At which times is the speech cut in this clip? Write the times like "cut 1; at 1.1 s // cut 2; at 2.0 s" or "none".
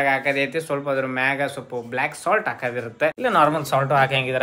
none